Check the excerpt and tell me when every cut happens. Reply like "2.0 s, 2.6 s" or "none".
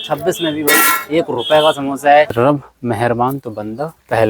2.3 s